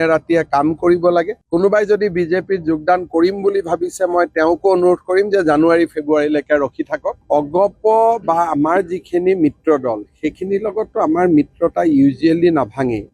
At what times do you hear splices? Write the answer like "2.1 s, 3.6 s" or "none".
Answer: 7.1 s

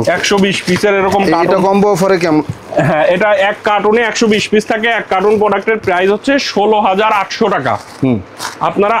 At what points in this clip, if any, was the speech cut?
none

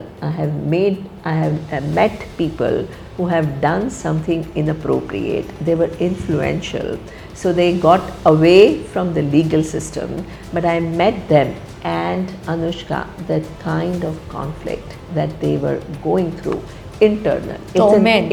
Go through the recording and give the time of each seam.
none

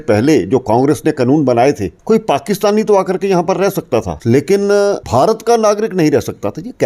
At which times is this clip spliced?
1.9 s, 4.1 s, 5.0 s

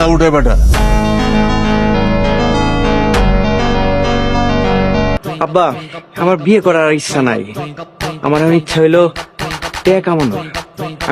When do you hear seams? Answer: 5.2 s

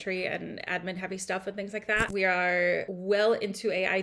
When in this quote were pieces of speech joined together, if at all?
2.1 s, 2.9 s

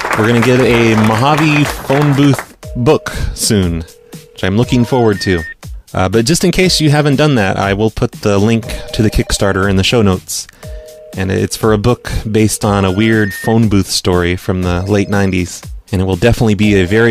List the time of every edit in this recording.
16.2 s

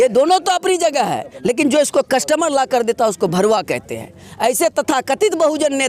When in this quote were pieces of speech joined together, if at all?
none

